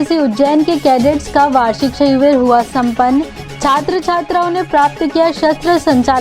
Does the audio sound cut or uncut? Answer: uncut